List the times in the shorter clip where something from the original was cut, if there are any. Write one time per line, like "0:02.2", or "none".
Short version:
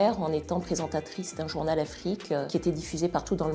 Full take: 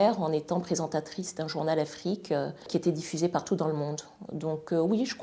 0:02.5